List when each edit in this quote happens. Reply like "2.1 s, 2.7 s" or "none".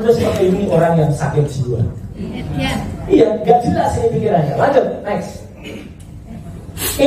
none